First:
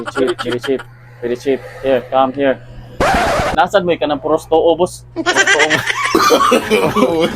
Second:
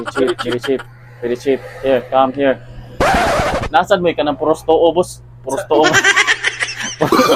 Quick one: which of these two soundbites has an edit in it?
first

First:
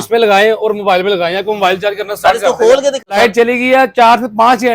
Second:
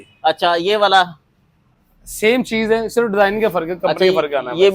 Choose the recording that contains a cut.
first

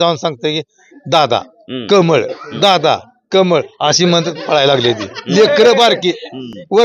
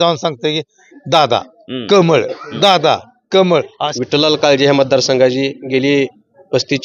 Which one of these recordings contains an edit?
second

